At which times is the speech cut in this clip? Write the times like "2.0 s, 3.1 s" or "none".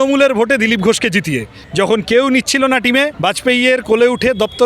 1.5 s, 3.1 s